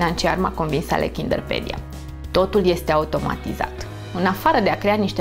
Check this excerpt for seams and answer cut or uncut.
uncut